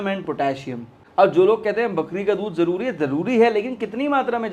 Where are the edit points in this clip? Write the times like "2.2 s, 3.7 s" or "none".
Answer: 0.9 s